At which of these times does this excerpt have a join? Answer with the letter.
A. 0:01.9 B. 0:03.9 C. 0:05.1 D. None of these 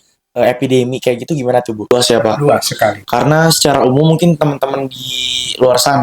A